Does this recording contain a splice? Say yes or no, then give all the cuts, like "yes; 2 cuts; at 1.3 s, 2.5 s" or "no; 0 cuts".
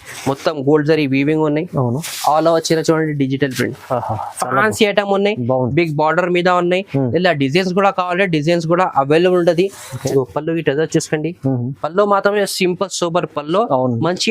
yes; 1 cut; at 10.1 s